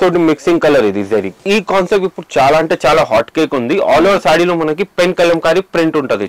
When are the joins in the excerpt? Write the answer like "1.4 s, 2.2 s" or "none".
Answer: 1.4 s